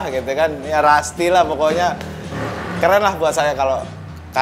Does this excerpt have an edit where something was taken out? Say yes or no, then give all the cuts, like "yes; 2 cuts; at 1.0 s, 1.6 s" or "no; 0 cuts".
no; 0 cuts